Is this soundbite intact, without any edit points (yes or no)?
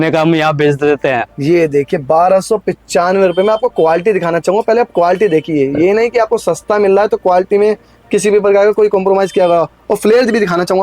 yes